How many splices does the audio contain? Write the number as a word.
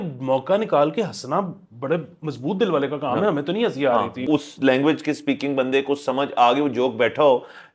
one